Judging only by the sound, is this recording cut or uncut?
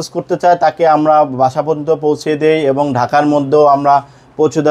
uncut